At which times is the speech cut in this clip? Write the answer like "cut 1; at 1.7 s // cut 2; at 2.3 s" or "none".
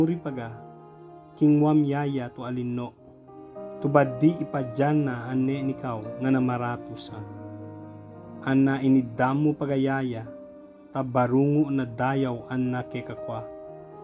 none